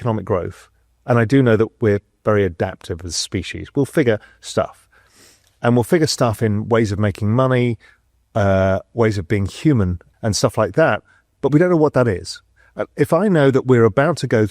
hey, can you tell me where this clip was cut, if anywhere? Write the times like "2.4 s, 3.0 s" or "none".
10.1 s